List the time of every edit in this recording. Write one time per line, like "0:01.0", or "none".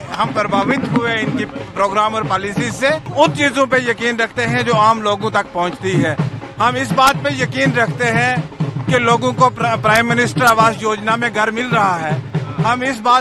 0:03.1